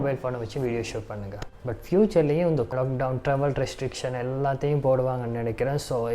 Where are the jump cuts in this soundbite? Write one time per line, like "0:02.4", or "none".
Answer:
0:01.4
0:02.7

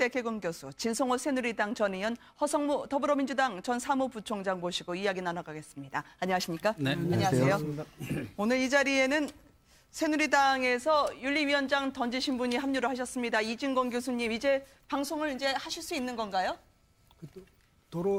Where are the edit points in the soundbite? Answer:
none

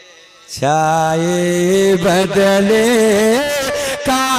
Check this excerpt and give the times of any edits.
none

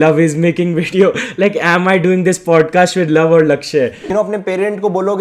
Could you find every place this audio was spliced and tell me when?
0:04.0

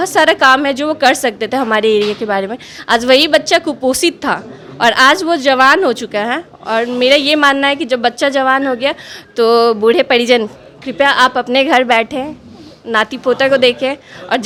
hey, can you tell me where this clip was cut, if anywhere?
none

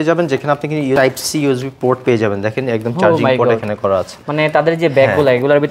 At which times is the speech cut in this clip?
0:01.0

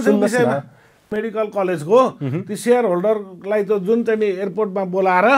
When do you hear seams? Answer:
0:01.1

